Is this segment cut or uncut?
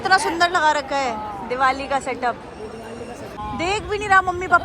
cut